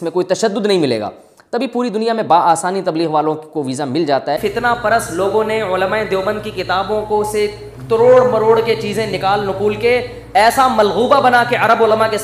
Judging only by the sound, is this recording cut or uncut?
cut